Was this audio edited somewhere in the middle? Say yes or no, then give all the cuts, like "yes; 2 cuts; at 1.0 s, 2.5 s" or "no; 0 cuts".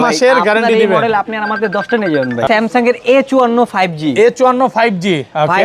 yes; 1 cut; at 2.5 s